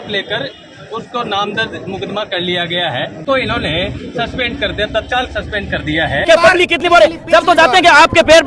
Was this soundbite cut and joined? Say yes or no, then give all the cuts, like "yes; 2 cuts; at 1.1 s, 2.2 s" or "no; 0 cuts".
yes; 2 cuts; at 3.2 s, 6.2 s